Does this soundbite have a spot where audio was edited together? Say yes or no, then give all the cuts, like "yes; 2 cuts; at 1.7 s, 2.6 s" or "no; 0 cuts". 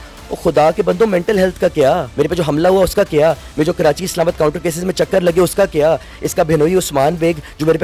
yes; 1 cut; at 2.1 s